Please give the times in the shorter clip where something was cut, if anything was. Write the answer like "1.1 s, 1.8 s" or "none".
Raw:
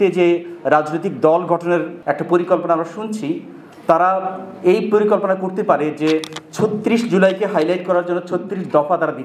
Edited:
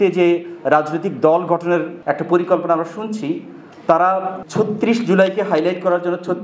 4.4 s